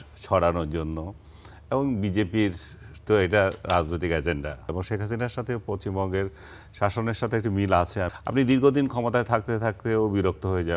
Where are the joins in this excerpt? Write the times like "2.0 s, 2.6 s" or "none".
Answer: 4.6 s, 8.1 s